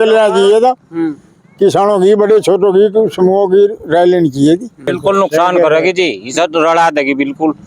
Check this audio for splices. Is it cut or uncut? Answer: cut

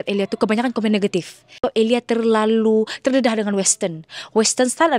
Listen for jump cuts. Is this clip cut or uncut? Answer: cut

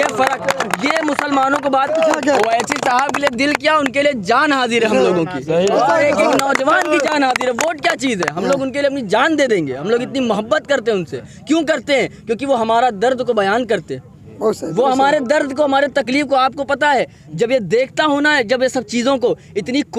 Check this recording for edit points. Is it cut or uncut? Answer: cut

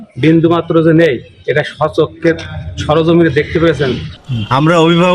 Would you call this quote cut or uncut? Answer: cut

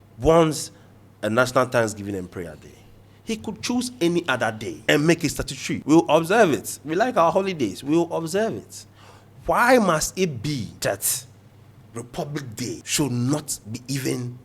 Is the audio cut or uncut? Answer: cut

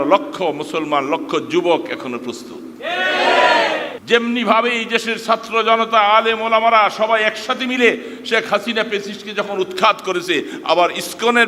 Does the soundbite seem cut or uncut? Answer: cut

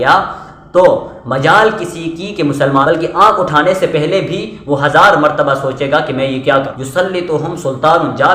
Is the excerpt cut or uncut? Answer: cut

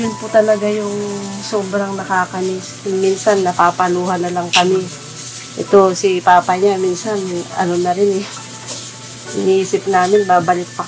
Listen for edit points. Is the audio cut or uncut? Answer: uncut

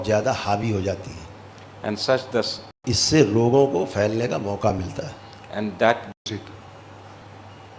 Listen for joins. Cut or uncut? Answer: uncut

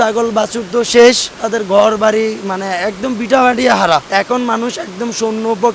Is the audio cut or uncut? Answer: cut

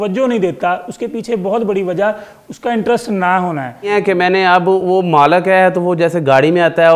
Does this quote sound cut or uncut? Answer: cut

